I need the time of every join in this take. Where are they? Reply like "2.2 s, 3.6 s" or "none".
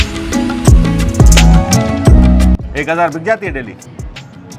2.6 s

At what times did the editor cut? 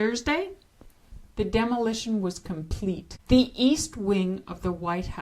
3.1 s

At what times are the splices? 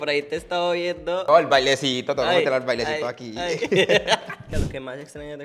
1.2 s, 4.5 s

